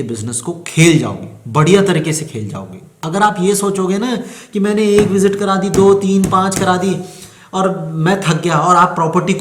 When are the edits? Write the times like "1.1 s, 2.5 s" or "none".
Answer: 3.0 s